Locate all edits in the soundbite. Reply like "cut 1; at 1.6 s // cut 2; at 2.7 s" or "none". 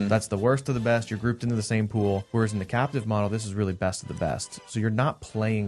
cut 1; at 2.2 s